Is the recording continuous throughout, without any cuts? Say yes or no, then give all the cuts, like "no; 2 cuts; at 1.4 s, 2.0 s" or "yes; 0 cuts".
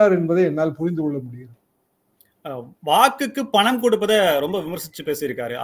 yes; 0 cuts